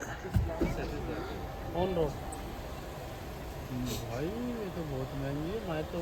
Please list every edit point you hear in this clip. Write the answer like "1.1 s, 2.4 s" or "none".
none